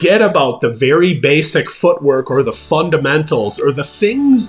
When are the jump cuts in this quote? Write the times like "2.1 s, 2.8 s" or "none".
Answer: none